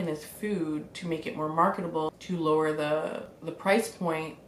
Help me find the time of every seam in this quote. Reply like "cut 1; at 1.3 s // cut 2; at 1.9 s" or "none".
none